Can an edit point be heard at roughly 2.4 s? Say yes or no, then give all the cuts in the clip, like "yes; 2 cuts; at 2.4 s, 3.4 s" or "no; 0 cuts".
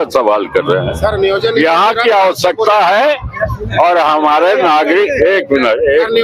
no; 0 cuts